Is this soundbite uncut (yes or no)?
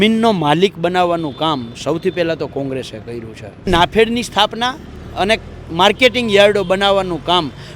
no